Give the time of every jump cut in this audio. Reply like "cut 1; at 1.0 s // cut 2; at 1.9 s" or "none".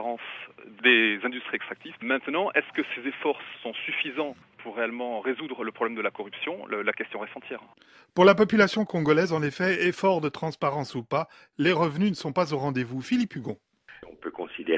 none